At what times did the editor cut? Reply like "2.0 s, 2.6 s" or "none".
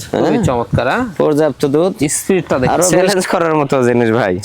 3.0 s